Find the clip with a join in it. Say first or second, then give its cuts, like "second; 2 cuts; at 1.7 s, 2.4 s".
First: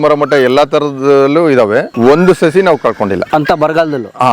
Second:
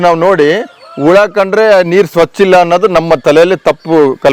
first; 2 cuts; at 1.9 s, 3.2 s